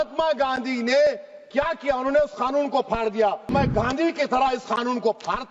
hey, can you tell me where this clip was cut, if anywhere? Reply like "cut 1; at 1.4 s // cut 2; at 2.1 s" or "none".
cut 1; at 3.5 s